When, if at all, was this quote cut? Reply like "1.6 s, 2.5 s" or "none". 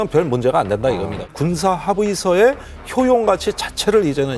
1.3 s